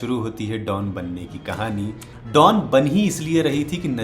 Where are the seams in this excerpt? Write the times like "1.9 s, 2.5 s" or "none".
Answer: 2.3 s